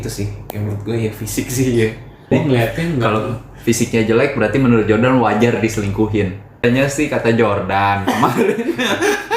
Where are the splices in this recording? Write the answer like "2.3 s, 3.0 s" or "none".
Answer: 2.3 s, 6.6 s